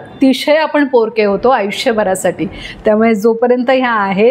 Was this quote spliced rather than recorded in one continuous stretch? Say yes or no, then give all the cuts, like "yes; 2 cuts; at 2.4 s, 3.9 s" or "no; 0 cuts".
no; 0 cuts